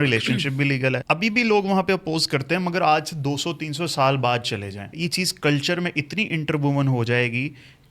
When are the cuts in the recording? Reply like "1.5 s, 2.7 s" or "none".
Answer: 1.0 s, 4.9 s